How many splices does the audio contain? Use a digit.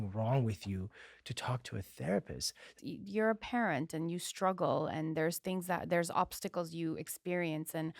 1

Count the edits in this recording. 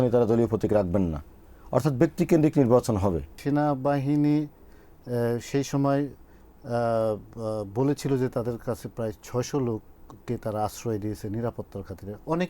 1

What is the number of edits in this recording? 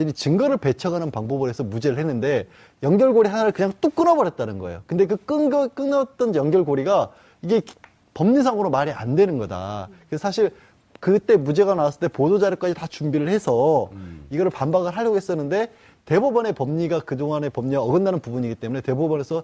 1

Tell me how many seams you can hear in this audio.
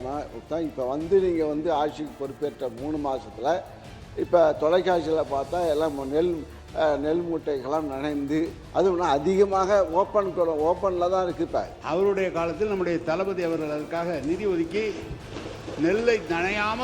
1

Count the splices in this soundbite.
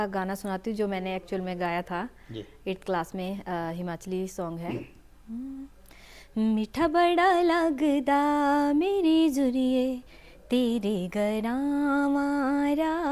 0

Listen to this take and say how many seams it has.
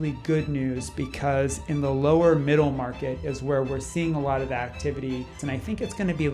1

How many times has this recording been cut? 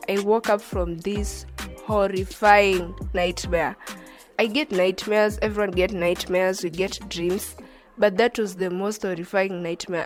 0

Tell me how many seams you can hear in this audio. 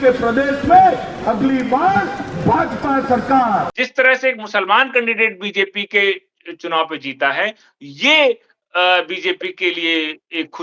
1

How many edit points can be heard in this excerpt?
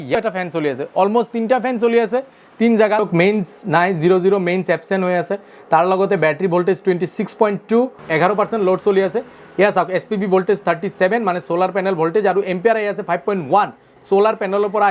2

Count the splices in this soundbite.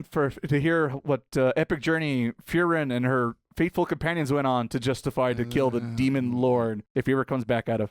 1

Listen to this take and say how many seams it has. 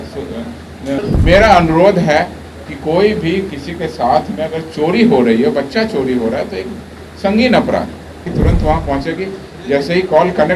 2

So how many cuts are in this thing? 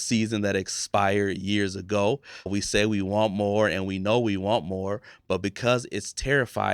1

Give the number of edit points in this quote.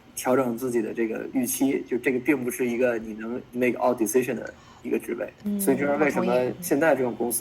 3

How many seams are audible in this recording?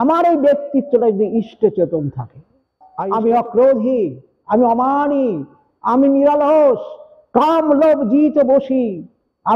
1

